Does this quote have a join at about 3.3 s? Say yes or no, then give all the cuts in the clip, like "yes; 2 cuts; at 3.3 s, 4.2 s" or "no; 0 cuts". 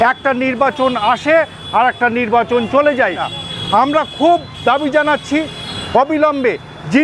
yes; 1 cut; at 3.3 s